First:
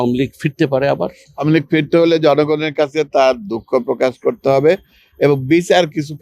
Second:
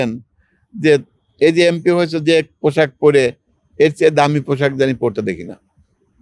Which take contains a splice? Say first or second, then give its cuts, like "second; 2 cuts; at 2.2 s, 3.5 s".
first; 1 cut; at 1.3 s